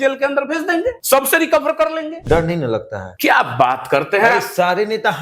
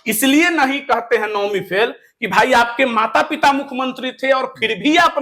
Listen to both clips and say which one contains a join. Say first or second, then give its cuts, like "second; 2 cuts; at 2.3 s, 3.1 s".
first; 3 cuts; at 1.0 s, 2.2 s, 3.0 s